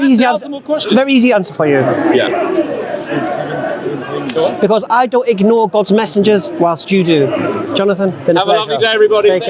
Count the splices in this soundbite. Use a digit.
0